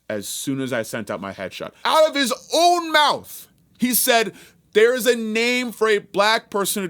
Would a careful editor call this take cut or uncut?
cut